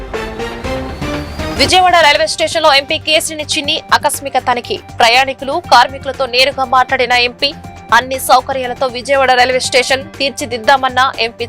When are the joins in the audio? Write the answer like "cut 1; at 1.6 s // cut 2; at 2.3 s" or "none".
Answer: none